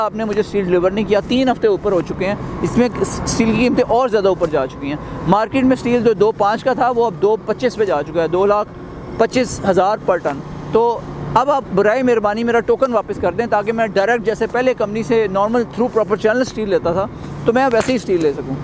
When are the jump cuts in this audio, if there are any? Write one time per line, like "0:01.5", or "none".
none

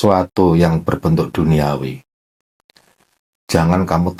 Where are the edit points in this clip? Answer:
none

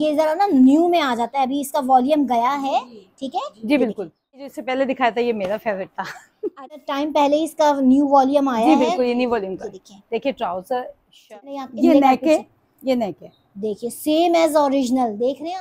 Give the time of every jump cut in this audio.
0:04.4
0:06.8
0:11.6

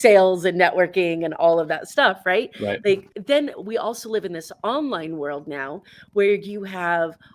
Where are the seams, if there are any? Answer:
0:03.1

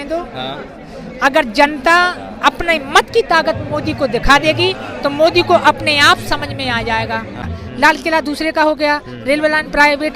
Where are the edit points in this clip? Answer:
0:07.5

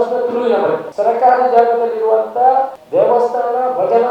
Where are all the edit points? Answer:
0:00.9
0:02.8

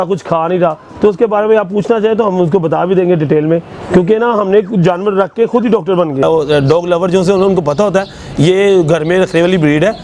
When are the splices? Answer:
0:06.2

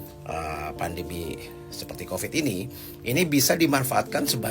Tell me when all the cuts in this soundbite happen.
none

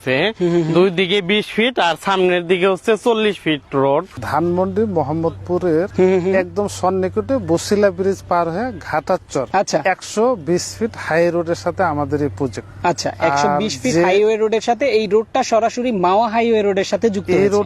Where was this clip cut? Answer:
0:04.1
0:05.9
0:09.5
0:12.7

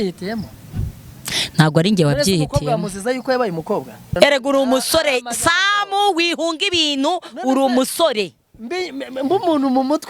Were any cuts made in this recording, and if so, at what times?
0:04.1

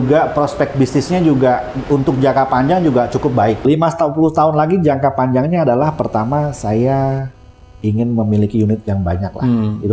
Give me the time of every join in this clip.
0:03.6

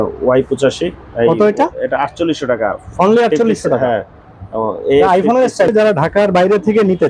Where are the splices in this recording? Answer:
0:05.7

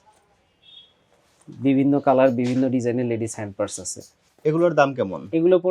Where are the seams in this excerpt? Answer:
none

